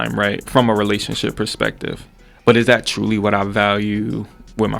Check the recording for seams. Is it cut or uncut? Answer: uncut